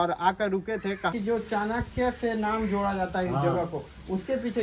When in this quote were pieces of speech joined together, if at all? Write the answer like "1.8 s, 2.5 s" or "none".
1.1 s